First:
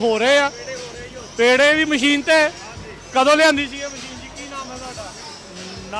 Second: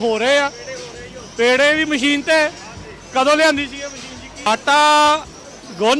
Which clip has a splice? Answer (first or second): second